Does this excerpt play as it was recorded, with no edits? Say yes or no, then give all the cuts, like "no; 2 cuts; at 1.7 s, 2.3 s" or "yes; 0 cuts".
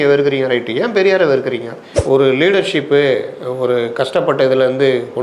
no; 1 cut; at 1.9 s